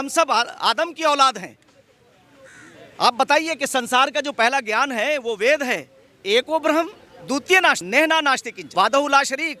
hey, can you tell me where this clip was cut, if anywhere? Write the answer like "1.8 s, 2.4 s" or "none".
7.8 s, 8.6 s